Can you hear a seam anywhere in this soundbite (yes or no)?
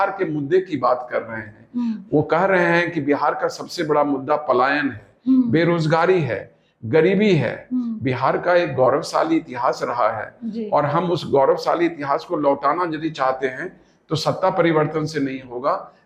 no